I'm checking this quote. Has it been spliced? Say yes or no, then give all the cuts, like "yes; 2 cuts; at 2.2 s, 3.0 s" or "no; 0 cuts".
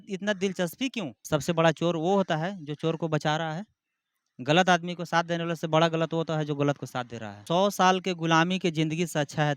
yes; 2 cuts; at 1.2 s, 7.3 s